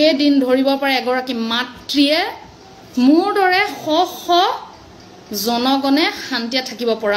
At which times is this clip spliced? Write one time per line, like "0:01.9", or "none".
none